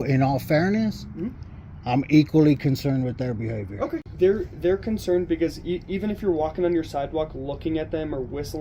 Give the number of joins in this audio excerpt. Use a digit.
1